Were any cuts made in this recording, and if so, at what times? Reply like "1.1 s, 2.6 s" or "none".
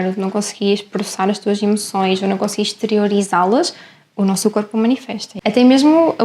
5.3 s